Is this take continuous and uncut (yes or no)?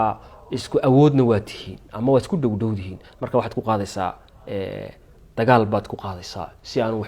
yes